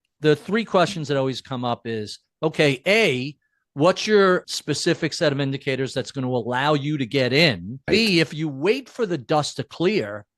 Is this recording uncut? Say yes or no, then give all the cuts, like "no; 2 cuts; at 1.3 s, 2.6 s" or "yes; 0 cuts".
no; 2 cuts; at 4.4 s, 7.8 s